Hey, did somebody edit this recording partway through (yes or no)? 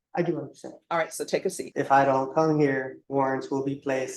yes